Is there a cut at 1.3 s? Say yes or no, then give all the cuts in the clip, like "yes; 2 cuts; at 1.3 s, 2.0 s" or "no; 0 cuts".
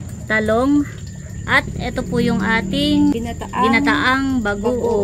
no; 1 cut; at 3.1 s